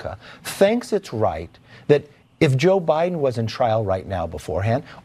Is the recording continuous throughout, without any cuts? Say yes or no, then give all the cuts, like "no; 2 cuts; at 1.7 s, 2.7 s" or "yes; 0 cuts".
yes; 0 cuts